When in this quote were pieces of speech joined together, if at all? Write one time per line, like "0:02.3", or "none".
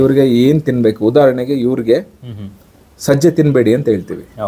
none